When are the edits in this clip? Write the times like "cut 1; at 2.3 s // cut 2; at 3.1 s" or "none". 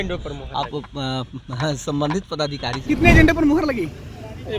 cut 1; at 2.7 s